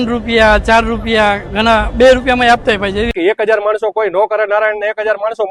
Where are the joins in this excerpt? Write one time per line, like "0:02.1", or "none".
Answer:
0:03.1